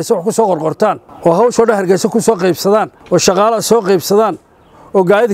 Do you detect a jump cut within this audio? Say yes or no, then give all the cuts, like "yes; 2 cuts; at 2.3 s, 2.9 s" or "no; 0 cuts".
yes; 2 cuts; at 1.1 s, 3.0 s